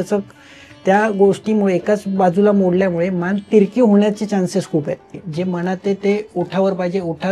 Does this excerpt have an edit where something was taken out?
yes; 1 cut; at 5.2 s

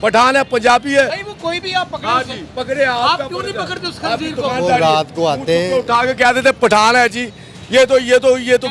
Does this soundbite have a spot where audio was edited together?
no; 0 cuts

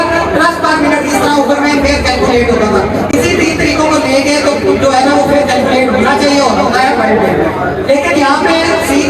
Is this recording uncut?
yes; 0 cuts

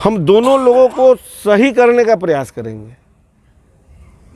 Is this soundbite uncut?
yes; 0 cuts

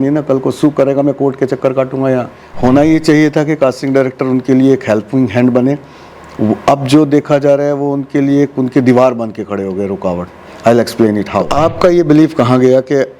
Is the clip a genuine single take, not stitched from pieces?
no; 2 cuts; at 2.4 s, 11.5 s

